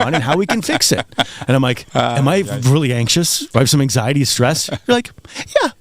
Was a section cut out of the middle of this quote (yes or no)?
yes